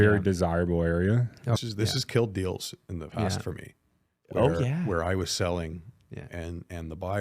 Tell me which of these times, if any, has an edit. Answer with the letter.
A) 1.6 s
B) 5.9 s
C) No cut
A